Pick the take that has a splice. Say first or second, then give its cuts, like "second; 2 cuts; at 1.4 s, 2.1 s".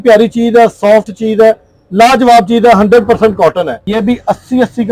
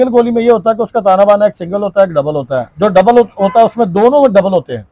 first; 1 cut; at 3.8 s